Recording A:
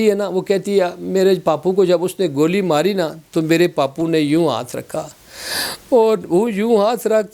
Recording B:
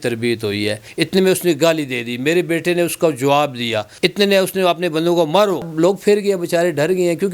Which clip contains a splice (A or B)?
B